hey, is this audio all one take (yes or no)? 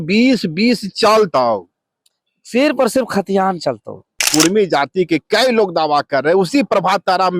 no